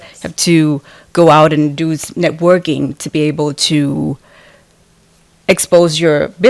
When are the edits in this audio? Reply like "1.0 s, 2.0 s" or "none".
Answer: none